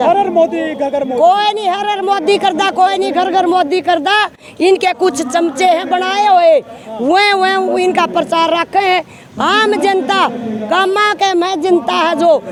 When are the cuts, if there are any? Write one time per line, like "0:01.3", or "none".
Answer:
none

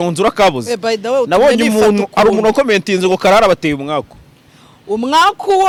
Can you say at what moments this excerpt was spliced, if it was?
none

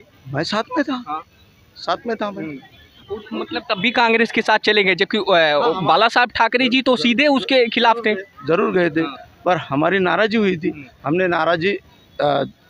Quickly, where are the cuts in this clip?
none

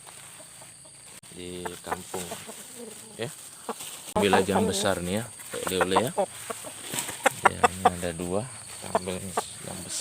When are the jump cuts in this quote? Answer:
0:04.2

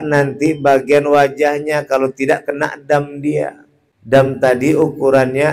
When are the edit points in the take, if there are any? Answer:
0:04.4

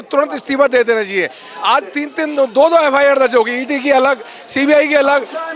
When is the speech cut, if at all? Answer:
none

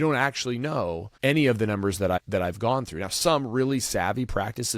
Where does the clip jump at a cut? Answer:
0:01.1
0:02.2

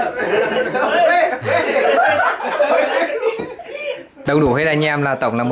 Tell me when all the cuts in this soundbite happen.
0:04.1

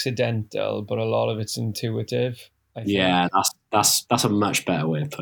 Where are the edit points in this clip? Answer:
none

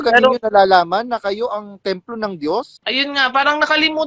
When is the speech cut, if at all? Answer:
0:02.8

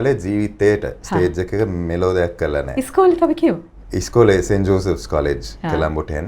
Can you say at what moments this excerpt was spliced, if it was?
none

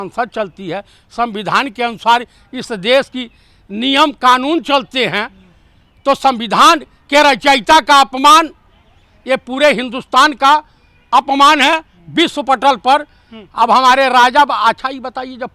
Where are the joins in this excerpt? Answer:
none

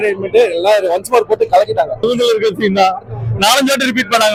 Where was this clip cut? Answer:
none

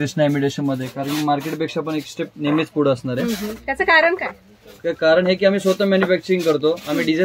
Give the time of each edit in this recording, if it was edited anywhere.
none

